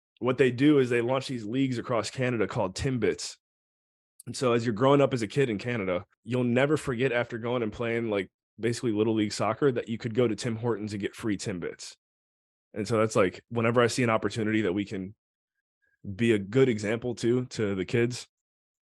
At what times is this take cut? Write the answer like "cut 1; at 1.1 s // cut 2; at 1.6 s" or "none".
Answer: cut 1; at 6.2 s // cut 2; at 13.4 s